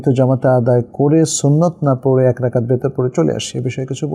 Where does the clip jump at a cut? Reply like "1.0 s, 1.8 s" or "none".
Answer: none